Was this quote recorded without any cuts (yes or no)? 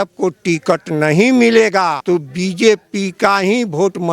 no